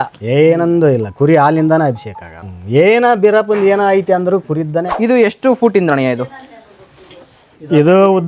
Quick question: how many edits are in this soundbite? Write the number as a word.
two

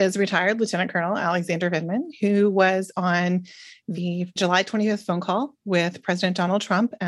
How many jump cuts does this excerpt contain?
zero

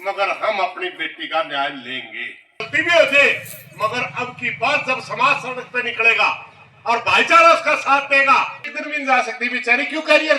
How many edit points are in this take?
two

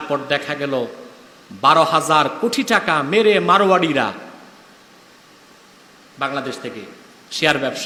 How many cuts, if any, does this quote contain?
zero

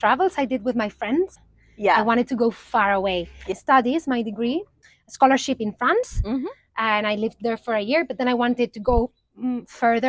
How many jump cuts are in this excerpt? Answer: three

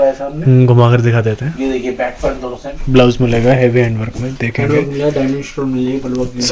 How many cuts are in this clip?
one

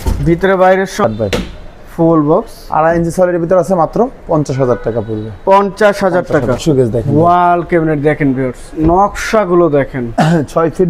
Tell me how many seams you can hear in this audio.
two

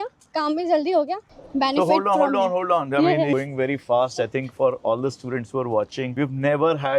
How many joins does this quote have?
three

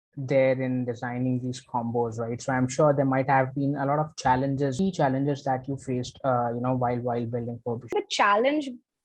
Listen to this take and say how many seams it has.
two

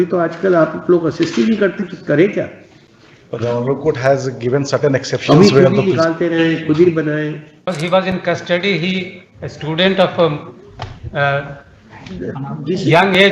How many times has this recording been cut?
one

